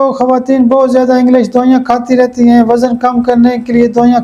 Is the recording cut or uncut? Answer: uncut